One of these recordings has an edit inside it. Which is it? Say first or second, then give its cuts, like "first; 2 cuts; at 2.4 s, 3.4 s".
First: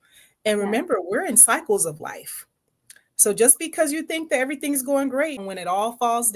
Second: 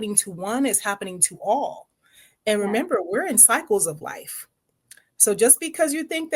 first; 1 cut; at 5.5 s